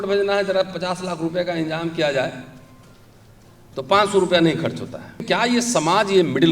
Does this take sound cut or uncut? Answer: cut